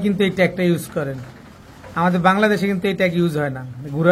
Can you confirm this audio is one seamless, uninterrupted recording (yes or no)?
yes